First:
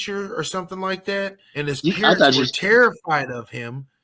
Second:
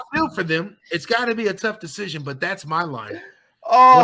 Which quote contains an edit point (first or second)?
first